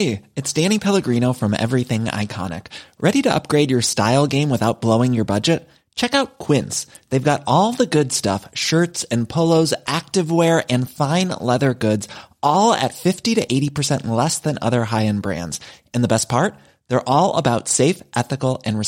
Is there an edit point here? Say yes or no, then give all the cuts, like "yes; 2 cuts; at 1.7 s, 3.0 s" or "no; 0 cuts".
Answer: no; 0 cuts